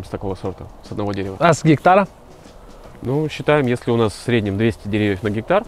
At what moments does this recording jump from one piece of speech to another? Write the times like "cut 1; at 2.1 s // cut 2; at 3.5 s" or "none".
none